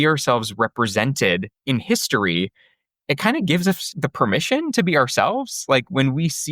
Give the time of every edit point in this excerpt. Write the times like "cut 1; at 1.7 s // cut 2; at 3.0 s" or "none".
cut 1; at 1.5 s // cut 2; at 3.9 s